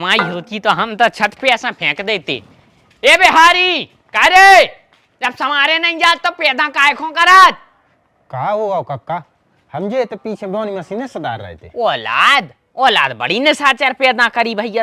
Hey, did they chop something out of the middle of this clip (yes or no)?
no